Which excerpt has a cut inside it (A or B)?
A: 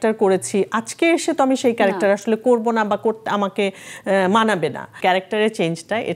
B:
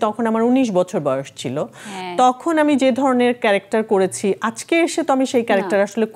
A